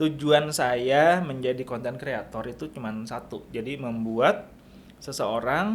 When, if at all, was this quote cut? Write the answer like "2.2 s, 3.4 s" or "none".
none